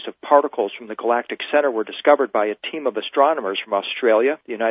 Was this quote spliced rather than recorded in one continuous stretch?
yes; 1 cut; at 2.9 s

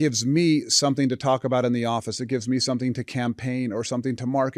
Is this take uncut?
yes; 0 cuts

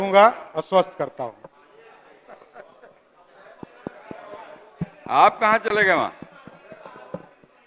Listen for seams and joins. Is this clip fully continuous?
yes; 0 cuts

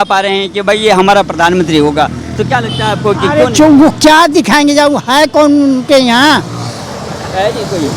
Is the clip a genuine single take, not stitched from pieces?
yes; 0 cuts

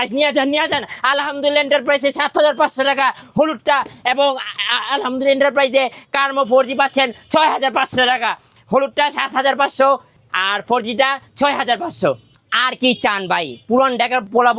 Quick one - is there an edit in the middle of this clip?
no; 0 cuts

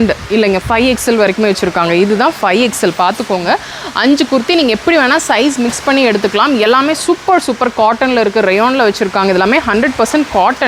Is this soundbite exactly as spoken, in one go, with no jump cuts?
yes; 0 cuts

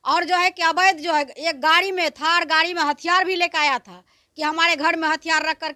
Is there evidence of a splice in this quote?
no; 0 cuts

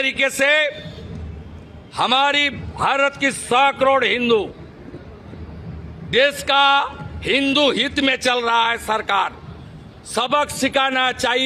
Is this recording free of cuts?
yes; 0 cuts

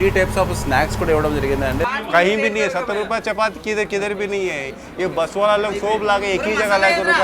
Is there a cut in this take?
yes; 1 cut; at 1.8 s

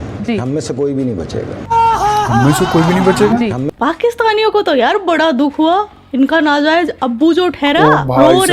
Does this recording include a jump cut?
yes; 1 cut; at 3.7 s

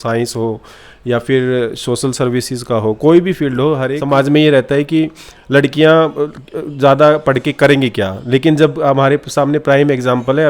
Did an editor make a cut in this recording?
yes; 1 cut; at 3.9 s

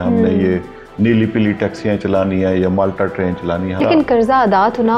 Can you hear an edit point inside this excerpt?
yes; 1 cut; at 3.8 s

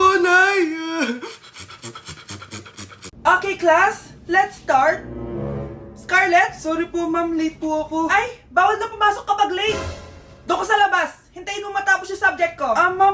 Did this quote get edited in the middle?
yes; 1 cut; at 3.0 s

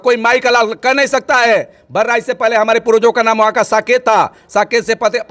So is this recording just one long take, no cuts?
yes; 0 cuts

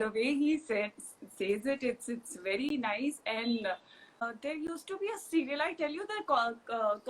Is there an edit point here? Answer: yes; 1 cut; at 4.2 s

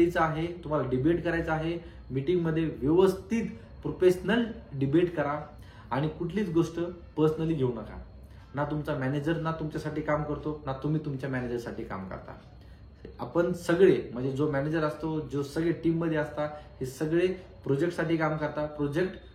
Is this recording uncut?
yes; 0 cuts

